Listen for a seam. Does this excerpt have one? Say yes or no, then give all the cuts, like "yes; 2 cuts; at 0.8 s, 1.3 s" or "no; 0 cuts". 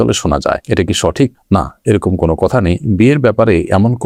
no; 0 cuts